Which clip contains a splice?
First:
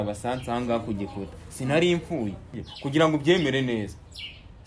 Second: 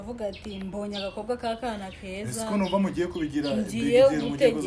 first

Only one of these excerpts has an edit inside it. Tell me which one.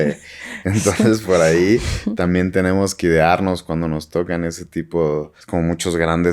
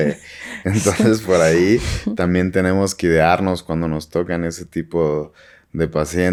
first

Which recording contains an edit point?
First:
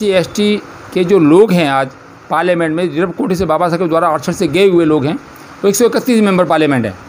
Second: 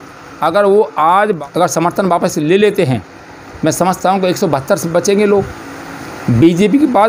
second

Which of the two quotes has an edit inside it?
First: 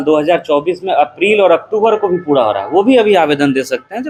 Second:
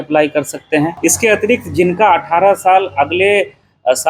second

